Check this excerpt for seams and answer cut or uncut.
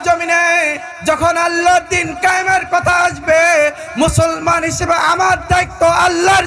uncut